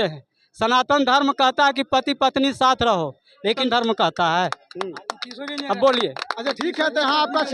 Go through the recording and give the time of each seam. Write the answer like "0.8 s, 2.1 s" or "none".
none